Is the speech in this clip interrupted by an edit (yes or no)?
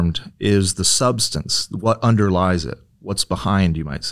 no